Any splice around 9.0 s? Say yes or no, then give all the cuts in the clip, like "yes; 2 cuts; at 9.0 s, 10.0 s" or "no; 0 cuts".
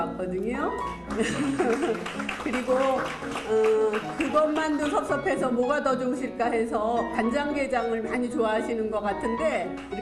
no; 1 cut; at 3.9 s